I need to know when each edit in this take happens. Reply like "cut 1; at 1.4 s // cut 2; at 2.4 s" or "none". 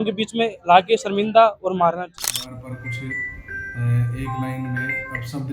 cut 1; at 2.2 s